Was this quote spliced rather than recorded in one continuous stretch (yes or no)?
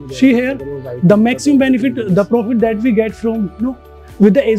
no